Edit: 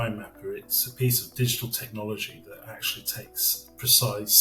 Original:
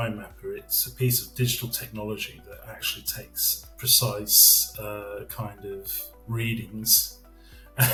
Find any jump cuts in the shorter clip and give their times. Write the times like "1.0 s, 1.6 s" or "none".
none